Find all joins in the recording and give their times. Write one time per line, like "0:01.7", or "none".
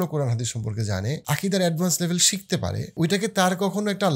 0:01.2
0:02.9